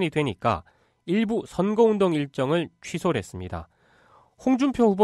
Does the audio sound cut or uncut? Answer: cut